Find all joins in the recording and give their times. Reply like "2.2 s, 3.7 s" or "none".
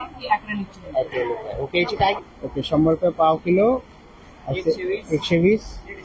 2.2 s